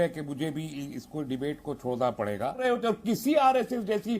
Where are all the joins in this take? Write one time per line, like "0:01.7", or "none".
0:02.6